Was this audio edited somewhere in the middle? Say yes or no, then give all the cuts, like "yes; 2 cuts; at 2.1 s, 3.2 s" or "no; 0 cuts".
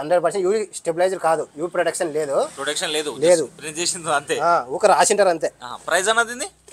no; 0 cuts